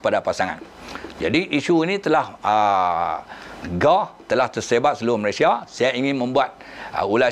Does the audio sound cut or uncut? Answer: uncut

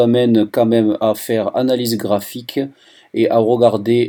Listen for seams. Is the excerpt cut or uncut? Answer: uncut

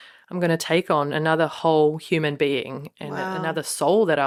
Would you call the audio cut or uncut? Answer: uncut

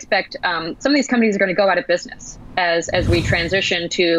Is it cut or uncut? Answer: uncut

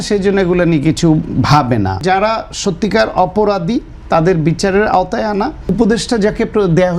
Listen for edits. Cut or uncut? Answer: cut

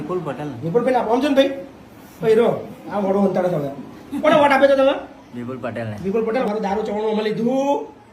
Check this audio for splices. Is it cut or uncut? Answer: cut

